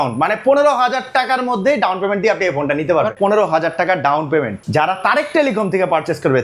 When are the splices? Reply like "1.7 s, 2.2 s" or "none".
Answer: 3.1 s, 4.6 s